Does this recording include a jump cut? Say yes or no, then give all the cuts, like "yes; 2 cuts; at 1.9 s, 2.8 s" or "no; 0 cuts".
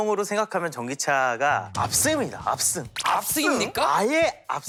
no; 0 cuts